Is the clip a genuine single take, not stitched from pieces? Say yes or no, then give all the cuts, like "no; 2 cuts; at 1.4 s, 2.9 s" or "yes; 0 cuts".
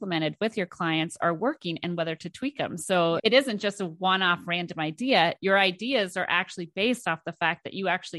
no; 1 cut; at 3.2 s